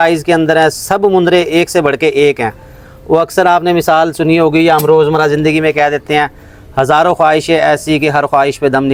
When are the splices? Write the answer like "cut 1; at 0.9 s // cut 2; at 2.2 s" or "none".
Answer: none